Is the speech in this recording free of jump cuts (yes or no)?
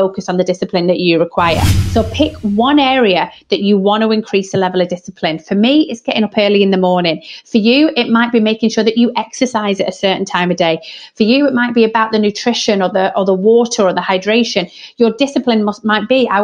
no